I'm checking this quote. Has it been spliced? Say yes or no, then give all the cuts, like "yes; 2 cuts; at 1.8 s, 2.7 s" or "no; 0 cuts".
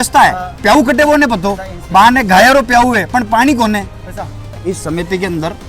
yes; 1 cut; at 4.4 s